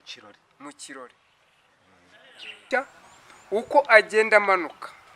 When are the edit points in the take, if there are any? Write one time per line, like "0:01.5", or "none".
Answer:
0:02.6

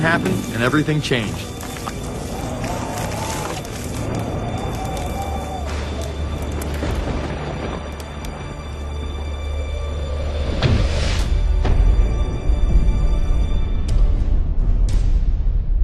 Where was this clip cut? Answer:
none

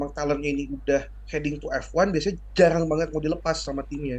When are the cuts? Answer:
none

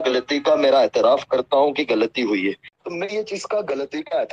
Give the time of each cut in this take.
0:02.7

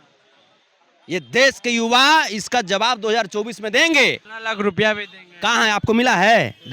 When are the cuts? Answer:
0:04.3

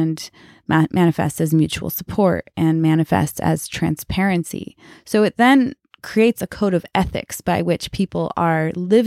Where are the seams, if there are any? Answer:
0:05.9

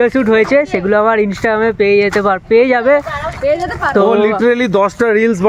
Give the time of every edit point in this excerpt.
none

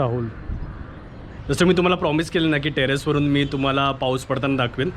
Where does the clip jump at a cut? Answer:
0:01.4

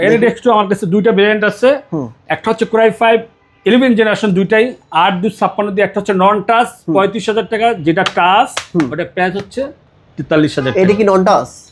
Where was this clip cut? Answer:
none

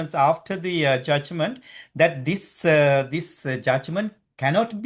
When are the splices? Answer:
none

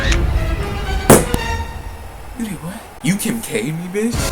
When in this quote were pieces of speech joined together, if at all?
0:02.9

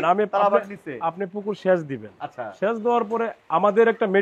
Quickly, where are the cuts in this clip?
none

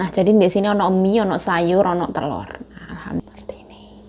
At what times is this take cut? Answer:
0:03.2

